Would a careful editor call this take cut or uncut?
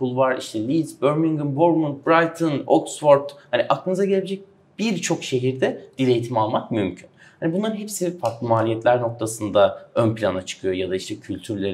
uncut